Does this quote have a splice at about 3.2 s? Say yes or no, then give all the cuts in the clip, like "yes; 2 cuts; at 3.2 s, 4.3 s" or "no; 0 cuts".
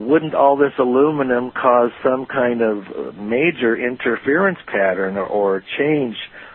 yes; 1 cut; at 3.2 s